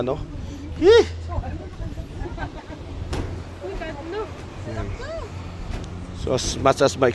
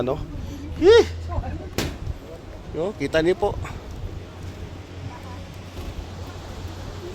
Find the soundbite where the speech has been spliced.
second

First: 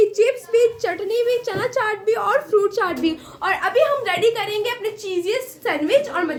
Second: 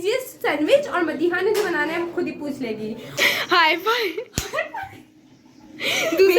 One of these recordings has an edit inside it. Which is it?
second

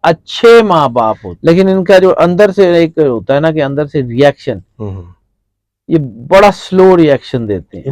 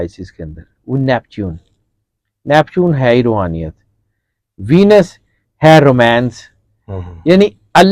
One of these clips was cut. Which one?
first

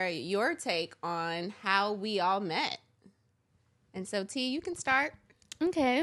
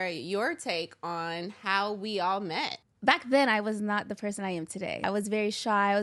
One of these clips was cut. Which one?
second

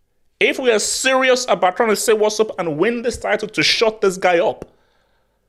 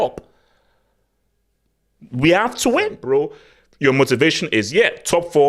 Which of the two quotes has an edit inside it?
second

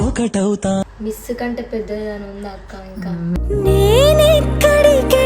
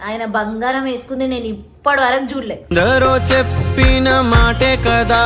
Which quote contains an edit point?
first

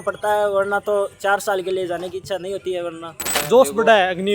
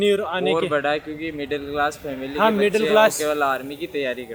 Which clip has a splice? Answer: first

